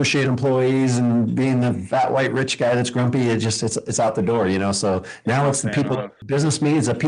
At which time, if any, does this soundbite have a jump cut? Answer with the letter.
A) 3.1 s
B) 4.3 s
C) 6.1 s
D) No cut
C